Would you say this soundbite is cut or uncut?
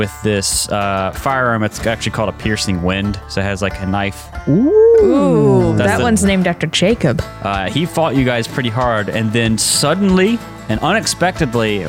cut